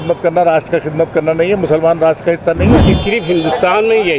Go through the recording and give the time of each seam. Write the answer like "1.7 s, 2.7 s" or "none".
2.9 s